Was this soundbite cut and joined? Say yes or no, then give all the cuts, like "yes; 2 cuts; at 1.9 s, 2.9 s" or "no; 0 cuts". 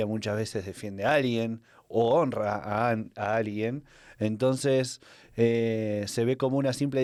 no; 0 cuts